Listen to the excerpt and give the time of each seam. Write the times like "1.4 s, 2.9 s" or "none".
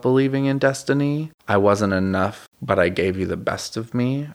1.3 s, 2.5 s